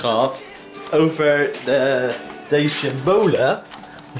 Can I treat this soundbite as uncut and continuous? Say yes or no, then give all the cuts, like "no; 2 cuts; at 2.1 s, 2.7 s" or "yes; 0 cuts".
yes; 0 cuts